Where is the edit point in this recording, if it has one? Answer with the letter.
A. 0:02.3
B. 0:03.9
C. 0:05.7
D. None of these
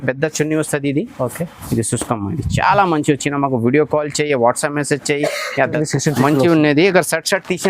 C